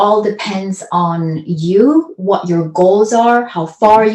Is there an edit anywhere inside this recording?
no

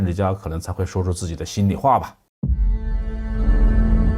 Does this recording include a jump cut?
yes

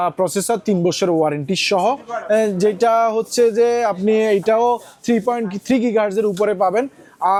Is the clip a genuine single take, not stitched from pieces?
yes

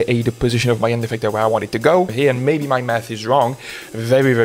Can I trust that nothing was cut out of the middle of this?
no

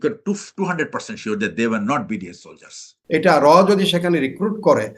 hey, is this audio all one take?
no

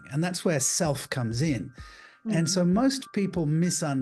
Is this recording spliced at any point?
no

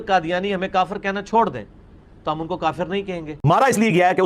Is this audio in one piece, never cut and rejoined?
no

